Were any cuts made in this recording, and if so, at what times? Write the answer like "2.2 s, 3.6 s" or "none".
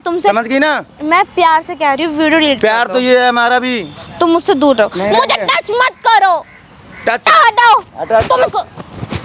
7.3 s